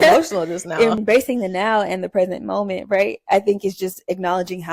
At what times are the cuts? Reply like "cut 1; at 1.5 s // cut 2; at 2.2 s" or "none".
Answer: cut 1; at 1.0 s